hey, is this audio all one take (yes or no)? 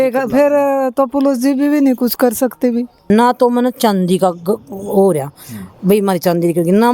no